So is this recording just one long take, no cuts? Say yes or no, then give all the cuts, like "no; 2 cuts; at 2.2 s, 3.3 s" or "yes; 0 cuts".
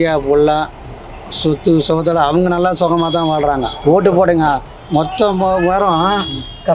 no; 1 cut; at 3.7 s